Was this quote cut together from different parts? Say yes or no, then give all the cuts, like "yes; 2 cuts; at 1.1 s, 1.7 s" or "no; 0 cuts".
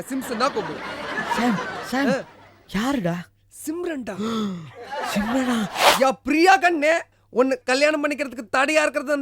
yes; 1 cut; at 5.8 s